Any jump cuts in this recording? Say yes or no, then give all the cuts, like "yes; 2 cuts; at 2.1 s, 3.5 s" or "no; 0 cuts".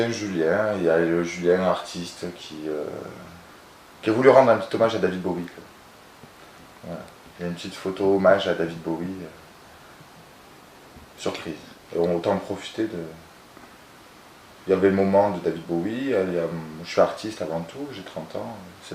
yes; 1 cut; at 12.7 s